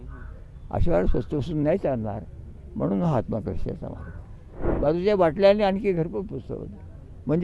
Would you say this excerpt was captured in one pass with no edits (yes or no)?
no